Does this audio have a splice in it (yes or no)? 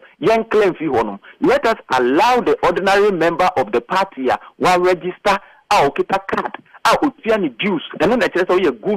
no